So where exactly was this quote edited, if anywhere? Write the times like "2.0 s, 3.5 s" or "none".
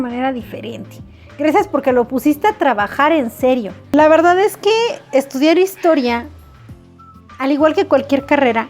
3.8 s